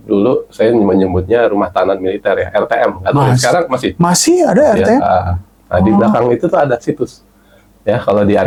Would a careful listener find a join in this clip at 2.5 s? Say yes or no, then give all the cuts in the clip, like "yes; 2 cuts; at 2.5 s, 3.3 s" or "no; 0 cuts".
no; 0 cuts